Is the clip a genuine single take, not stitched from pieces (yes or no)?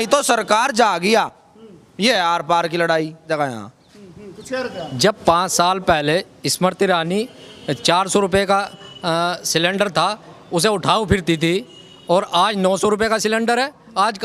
yes